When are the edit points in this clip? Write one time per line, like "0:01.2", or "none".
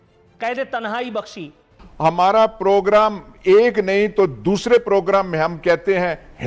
0:01.8